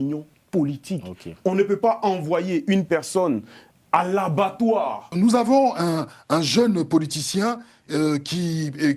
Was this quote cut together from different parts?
yes; 1 cut; at 5.1 s

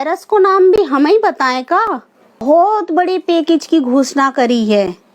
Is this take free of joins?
no; 1 cut; at 2.3 s

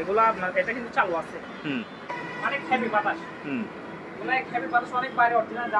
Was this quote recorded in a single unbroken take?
no; 1 cut; at 2.1 s

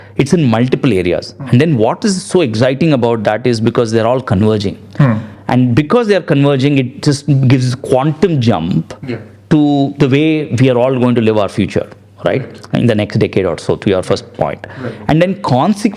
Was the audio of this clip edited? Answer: no; 0 cuts

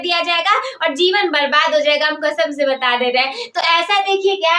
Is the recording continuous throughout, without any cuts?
yes; 0 cuts

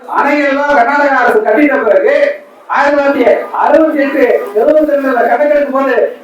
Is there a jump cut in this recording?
no; 0 cuts

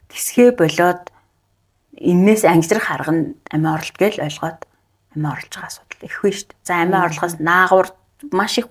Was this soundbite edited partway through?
no; 0 cuts

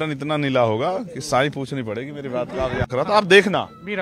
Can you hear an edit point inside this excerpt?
yes; 1 cut; at 2.9 s

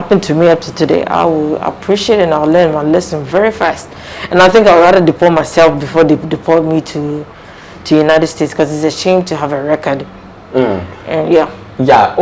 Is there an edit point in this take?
no; 0 cuts

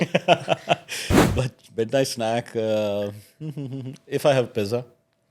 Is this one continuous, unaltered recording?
yes; 0 cuts

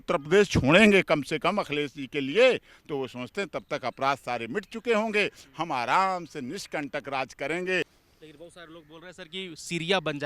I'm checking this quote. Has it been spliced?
yes; 1 cut; at 8.0 s

